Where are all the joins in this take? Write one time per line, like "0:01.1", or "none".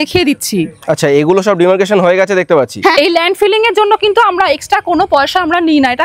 0:02.9